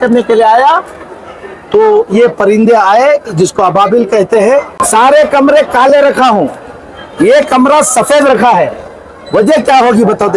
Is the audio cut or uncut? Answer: cut